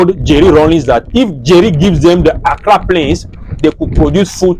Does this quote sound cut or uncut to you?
uncut